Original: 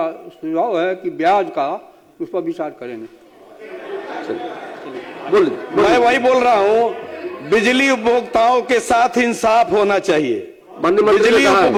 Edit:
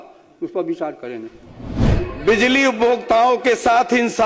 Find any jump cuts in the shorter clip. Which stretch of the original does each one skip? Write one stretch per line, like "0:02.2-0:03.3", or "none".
0:03.6-0:07.1